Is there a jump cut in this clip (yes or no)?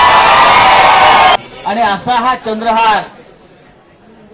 yes